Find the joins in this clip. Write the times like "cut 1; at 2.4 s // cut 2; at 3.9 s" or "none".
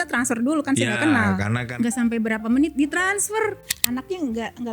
cut 1; at 1.6 s // cut 2; at 3.6 s